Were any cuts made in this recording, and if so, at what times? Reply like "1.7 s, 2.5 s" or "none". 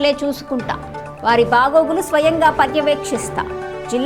none

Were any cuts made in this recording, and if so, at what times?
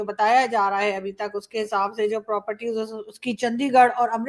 none

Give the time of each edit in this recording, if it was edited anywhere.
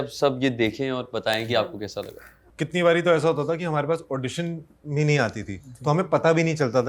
2.5 s

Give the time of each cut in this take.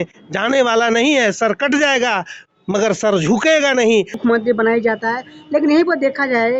4.2 s

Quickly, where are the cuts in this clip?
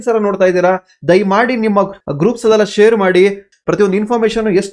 1.9 s, 3.5 s

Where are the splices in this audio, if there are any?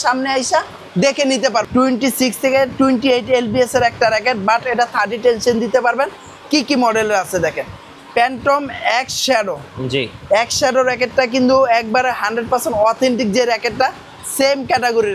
1.7 s

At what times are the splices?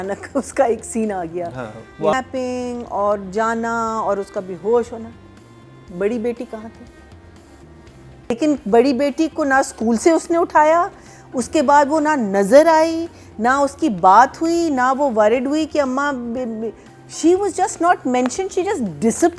2.1 s, 8.4 s

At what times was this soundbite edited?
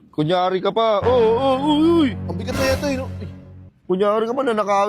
none

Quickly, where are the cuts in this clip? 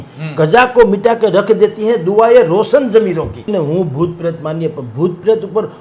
3.5 s

